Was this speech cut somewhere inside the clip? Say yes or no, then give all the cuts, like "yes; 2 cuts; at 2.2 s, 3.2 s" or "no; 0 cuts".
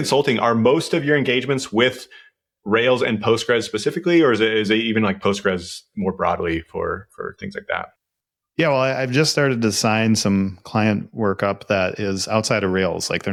no; 0 cuts